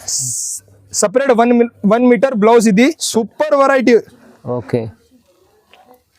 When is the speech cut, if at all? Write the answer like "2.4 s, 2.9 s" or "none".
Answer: 3.0 s